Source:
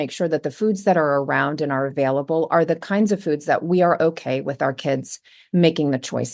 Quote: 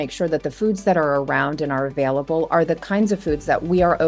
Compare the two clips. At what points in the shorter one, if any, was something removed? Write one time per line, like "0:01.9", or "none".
none